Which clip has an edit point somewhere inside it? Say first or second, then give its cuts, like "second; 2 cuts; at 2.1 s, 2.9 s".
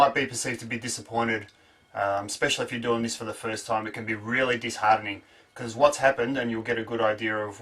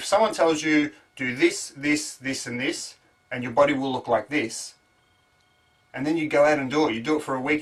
first; 1 cut; at 5.9 s